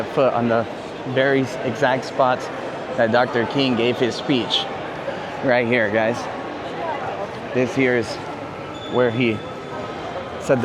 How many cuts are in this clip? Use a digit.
0